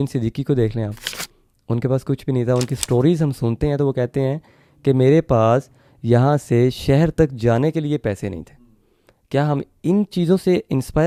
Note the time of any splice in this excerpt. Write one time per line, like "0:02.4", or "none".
none